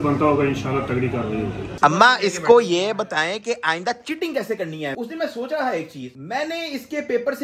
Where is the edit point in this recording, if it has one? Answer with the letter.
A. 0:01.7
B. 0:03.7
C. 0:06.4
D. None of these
A